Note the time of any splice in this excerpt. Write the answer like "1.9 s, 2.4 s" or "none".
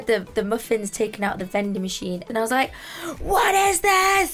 2.2 s